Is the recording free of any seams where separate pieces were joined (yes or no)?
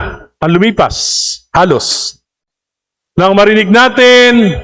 yes